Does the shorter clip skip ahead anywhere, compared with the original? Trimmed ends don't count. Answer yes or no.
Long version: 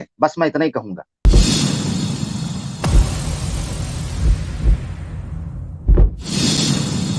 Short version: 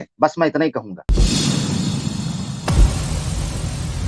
yes